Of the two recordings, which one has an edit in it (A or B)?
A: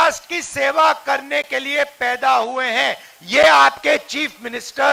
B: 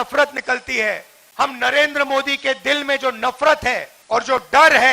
B